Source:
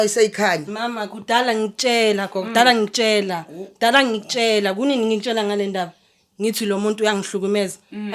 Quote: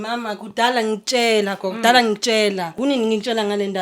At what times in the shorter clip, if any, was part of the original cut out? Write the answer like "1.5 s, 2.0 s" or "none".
2.8 s